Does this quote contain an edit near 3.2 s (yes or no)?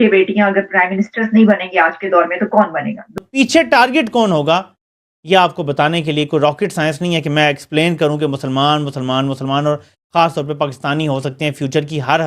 yes